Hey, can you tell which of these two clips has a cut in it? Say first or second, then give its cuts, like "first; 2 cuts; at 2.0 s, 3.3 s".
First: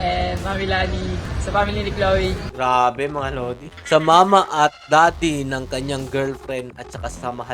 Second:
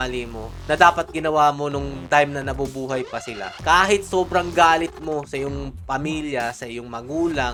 first; 3 cuts; at 1.3 s, 2.4 s, 3.7 s